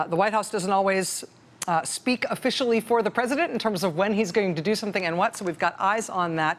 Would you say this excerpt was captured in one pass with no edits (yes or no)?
no